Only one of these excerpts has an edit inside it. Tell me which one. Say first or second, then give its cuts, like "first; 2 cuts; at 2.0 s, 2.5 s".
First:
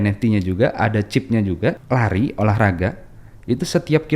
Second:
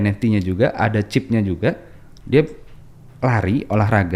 first; 1 cut; at 1.8 s